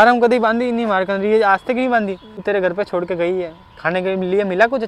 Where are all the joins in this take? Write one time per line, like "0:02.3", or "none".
0:02.2